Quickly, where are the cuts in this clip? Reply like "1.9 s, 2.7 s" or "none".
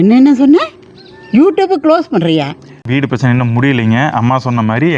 2.8 s